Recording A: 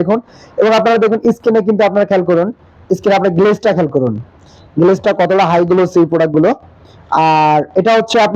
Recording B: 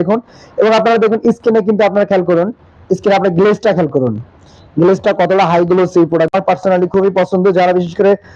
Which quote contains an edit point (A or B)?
B